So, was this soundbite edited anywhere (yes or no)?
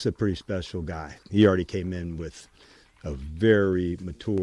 yes